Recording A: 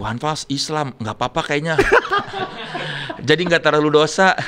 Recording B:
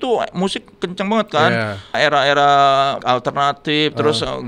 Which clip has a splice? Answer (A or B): B